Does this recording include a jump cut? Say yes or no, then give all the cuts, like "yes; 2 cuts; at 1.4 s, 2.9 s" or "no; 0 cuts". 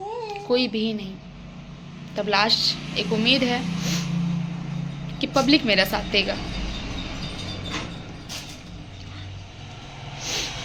no; 0 cuts